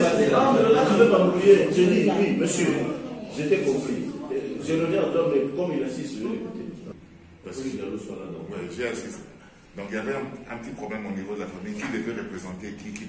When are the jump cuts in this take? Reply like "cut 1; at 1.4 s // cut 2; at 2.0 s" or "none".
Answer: cut 1; at 6.9 s